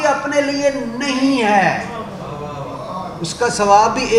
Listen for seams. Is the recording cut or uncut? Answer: uncut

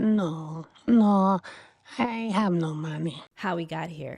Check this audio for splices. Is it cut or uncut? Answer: cut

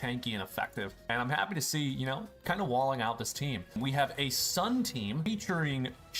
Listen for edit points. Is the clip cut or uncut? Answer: cut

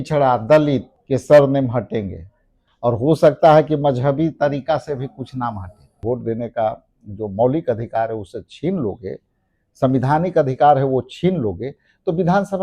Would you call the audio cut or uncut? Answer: cut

